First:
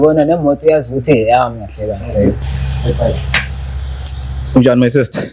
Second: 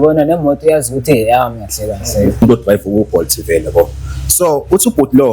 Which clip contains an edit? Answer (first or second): second